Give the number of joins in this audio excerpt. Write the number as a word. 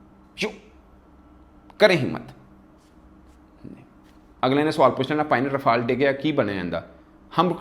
one